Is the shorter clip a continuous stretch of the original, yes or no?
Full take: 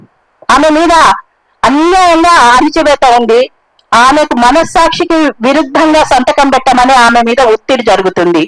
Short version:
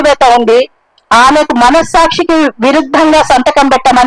yes